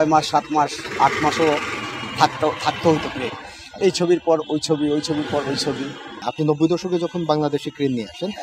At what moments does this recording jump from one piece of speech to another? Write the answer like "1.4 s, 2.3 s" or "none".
none